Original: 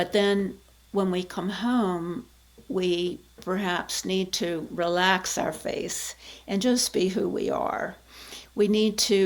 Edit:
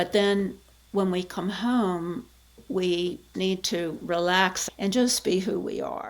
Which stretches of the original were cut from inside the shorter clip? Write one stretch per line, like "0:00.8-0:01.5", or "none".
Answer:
0:03.3-0:03.9
0:05.3-0:06.3